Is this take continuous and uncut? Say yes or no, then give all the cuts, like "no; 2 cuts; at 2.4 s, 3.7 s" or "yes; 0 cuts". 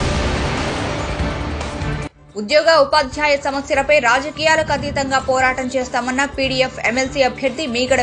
no; 1 cut; at 2.2 s